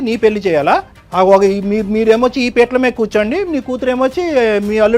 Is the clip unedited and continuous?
no; 1 cut; at 1.0 s

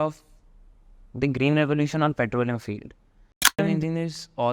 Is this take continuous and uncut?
no; 1 cut; at 3.6 s

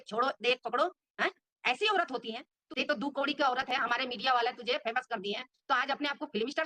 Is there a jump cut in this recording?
yes; 1 cut; at 2.5 s

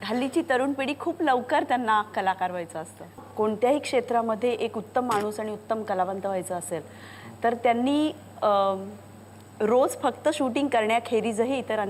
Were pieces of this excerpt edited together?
yes; 1 cut; at 3.2 s

